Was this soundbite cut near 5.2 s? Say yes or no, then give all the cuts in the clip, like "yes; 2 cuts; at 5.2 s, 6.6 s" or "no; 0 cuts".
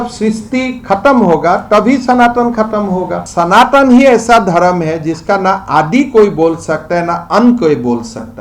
no; 1 cut; at 3.2 s